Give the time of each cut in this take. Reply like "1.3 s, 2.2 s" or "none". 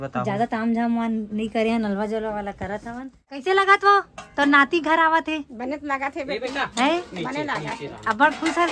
3.4 s

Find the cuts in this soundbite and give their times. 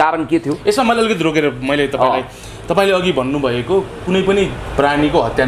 none

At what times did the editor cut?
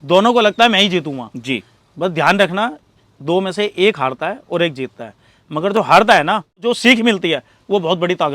6.6 s

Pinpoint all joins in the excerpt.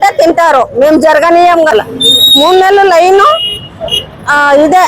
1.7 s

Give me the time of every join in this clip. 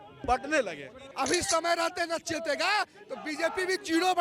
1.1 s

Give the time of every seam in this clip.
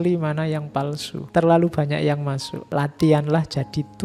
1.2 s, 2.5 s

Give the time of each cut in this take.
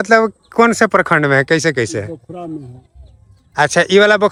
none

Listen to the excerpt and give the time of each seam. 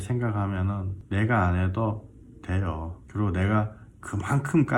0.9 s, 3.0 s

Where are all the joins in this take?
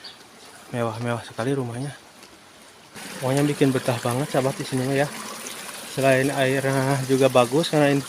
3.0 s

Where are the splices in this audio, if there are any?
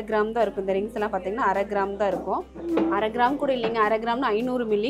2.5 s

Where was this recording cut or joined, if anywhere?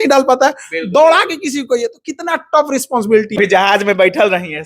3.4 s

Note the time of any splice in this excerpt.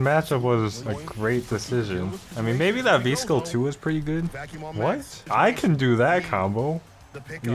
0.8 s, 2.3 s, 5.1 s

